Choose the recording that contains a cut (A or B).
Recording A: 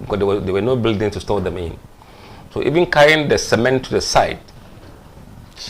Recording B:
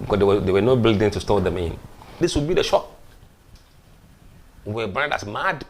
B